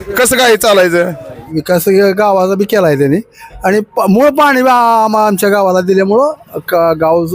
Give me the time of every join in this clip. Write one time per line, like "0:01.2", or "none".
0:01.5